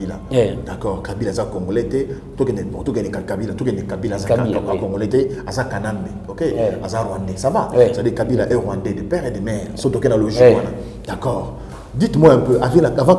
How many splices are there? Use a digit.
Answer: 0